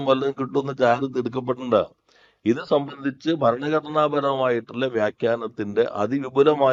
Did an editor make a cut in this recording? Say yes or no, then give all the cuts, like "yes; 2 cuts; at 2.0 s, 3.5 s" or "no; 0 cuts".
no; 0 cuts